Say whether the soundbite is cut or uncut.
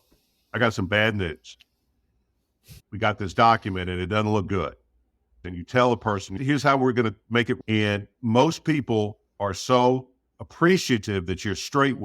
cut